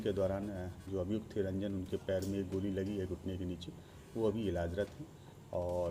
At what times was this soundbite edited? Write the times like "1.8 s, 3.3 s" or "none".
none